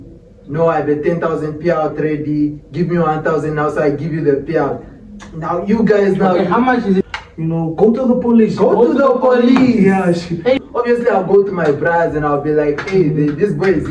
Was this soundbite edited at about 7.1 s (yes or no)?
yes